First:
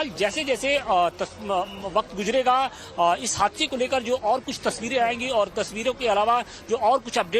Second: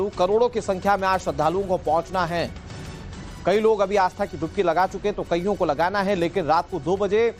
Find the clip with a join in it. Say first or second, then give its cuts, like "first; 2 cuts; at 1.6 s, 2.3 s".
first; 1 cut; at 5.2 s